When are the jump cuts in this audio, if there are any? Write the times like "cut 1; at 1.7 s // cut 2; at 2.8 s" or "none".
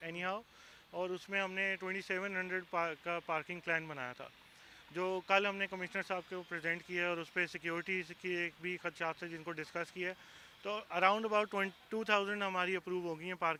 none